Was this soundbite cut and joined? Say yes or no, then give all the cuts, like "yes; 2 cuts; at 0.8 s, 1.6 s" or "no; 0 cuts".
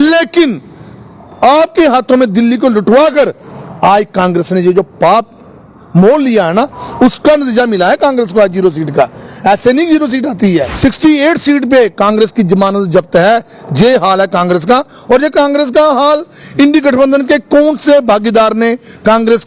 yes; 1 cut; at 10.7 s